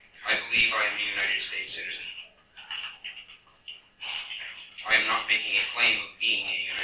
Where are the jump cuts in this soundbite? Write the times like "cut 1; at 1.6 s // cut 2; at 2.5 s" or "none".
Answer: none